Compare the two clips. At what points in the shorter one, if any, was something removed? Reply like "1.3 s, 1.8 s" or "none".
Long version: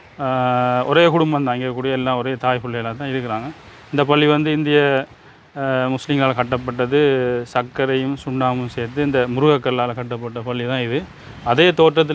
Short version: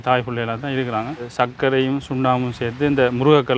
1.3 s